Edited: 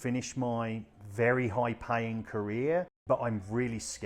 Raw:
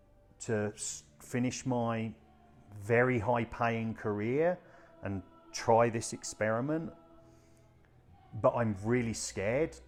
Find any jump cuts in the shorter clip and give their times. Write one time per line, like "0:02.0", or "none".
0:00.9
0:03.0

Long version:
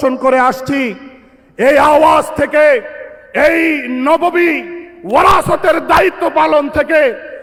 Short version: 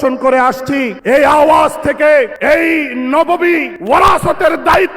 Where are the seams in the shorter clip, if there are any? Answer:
0:00.9
0:02.3
0:03.7

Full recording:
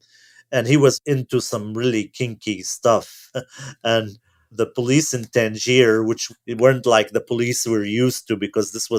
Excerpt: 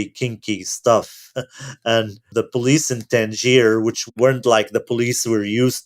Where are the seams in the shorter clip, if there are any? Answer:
0:02.2
0:04.0

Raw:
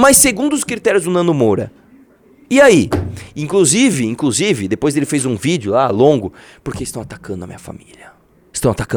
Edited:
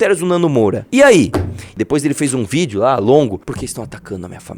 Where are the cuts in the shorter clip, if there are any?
0:00.8
0:01.7
0:03.4

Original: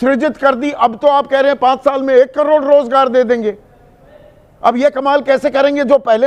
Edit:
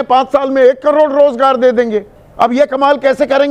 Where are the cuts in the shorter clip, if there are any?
0:02.2

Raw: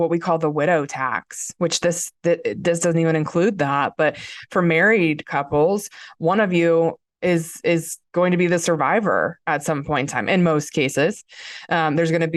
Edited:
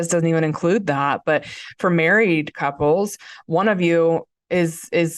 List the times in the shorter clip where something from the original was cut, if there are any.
none

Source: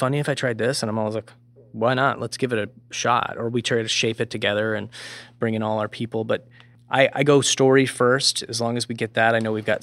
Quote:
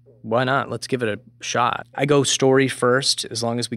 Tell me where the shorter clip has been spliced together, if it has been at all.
0:01.9

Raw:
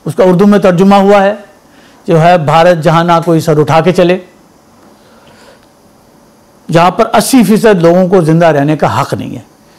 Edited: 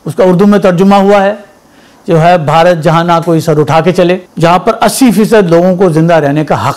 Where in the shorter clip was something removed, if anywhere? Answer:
0:04.3

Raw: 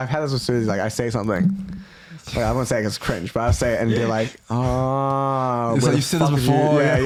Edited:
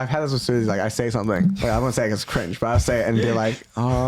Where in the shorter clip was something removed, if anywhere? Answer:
0:01.6

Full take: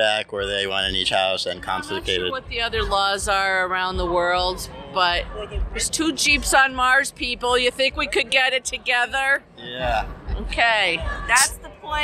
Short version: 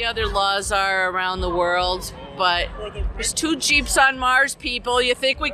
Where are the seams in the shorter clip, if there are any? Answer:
none

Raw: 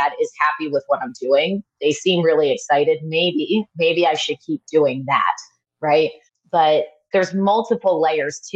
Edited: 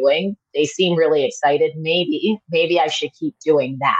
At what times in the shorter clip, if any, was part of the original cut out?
none

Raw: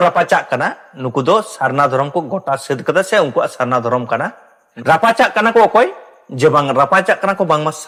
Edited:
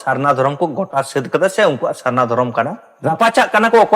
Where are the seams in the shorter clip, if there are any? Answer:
0:02.9

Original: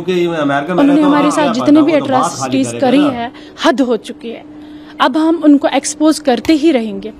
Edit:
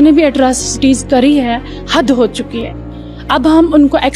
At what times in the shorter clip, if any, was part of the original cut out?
none

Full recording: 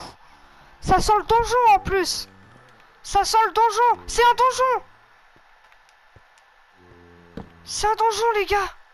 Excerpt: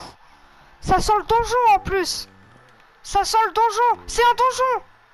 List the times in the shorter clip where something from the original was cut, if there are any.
none

